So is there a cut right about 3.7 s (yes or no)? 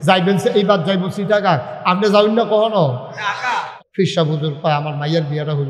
yes